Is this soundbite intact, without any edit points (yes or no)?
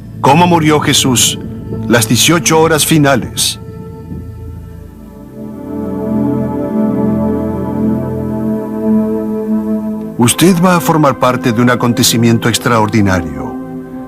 no